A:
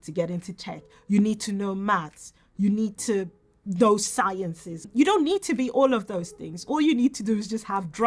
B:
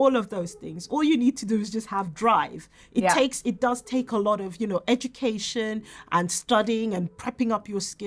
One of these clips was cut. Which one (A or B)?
A